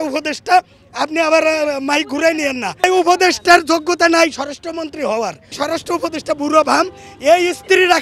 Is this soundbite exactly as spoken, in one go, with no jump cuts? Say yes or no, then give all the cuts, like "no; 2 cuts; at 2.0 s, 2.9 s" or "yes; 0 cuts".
no; 2 cuts; at 2.8 s, 5.6 s